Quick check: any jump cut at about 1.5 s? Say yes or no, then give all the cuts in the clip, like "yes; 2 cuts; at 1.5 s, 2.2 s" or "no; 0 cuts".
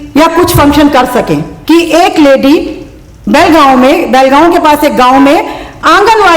yes; 1 cut; at 1.5 s